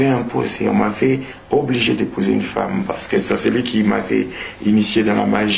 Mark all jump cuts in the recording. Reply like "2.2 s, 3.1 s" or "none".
none